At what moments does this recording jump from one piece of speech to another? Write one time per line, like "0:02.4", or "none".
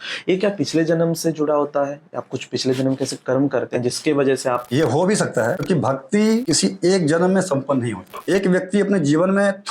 0:04.7
0:05.6
0:06.4
0:08.1